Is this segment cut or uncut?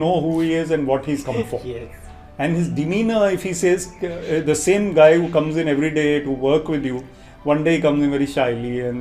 uncut